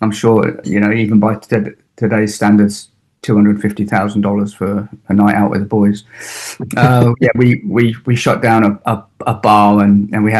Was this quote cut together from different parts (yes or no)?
no